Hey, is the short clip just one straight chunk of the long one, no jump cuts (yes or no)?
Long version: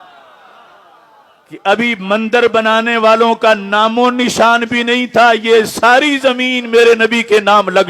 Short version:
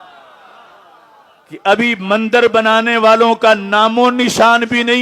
yes